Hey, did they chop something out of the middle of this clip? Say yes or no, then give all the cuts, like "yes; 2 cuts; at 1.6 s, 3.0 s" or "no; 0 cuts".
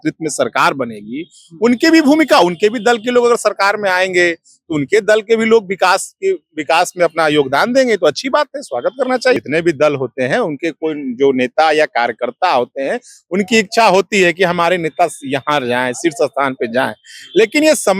yes; 1 cut; at 9.4 s